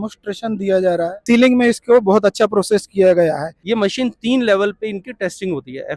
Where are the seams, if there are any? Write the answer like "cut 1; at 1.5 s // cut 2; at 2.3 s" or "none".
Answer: cut 1; at 1.2 s // cut 2; at 3.5 s